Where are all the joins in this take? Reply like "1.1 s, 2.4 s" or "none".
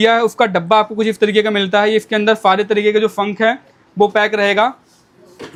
none